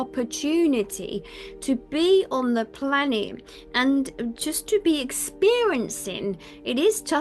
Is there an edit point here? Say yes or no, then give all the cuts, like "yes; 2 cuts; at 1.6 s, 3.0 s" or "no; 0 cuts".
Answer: no; 0 cuts